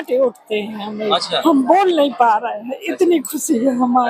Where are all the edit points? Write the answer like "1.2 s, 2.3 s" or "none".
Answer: 1.4 s